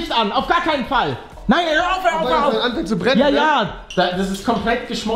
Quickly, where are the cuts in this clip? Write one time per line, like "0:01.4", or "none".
0:01.4
0:03.8